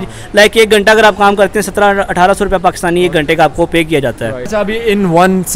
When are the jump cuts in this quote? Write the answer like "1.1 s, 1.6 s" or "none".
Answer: 4.5 s